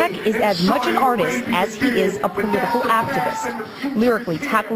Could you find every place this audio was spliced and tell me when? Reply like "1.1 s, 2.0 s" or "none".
2.4 s